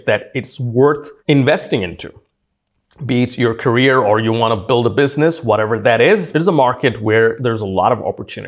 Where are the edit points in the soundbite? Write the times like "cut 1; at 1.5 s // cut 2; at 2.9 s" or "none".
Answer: cut 1; at 6.3 s // cut 2; at 7.4 s